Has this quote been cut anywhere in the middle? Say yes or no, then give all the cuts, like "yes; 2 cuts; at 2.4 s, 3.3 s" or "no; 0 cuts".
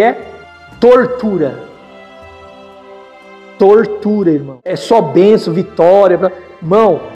yes; 1 cut; at 4.8 s